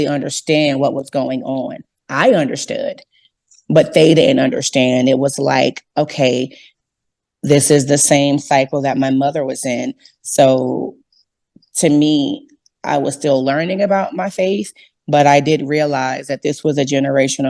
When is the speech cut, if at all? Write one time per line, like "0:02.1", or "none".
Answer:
0:06.7